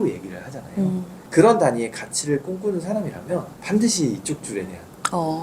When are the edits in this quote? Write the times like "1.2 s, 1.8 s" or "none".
1.2 s, 3.5 s